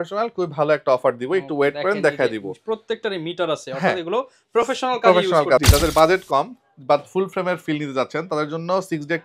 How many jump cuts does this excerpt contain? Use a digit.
1